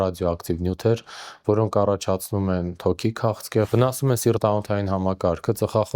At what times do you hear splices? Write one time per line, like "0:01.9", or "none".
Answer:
0:03.7